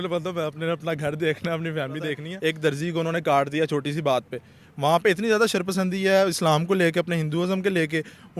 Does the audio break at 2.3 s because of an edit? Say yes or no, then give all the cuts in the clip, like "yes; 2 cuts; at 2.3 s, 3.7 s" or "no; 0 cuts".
yes; 1 cut; at 2.3 s